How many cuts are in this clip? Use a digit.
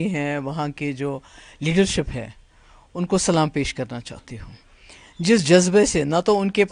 0